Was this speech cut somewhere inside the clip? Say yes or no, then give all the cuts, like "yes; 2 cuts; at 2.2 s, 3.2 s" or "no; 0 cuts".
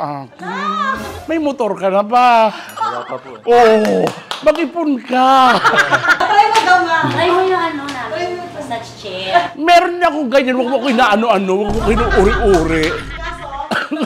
yes; 1 cut; at 6.1 s